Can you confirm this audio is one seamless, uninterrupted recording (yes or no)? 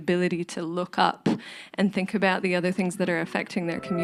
yes